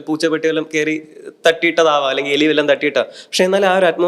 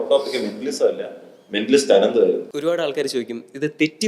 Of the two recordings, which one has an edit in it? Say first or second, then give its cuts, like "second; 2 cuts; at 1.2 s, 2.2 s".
second; 1 cut; at 2.5 s